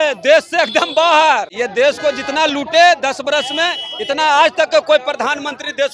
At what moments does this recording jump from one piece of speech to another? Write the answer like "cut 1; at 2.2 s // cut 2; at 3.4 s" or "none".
cut 1; at 1.5 s

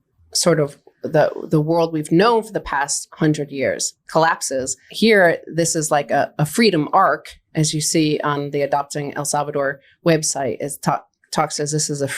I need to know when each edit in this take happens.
cut 1; at 4.9 s

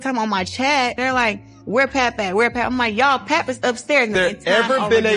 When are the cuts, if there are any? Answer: cut 1; at 1.0 s // cut 2; at 4.1 s

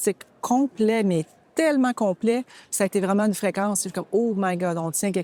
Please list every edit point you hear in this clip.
none

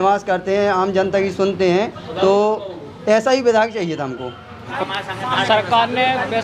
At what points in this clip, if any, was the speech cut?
cut 1; at 4.7 s

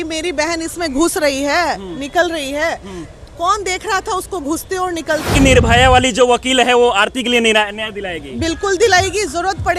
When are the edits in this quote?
cut 1; at 5.3 s

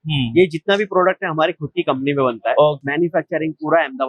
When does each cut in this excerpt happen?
cut 1; at 2.8 s

